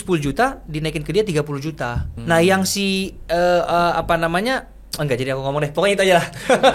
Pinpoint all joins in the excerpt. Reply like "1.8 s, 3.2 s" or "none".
2.1 s